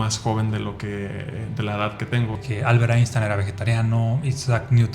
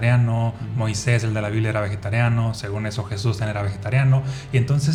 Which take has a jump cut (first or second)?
first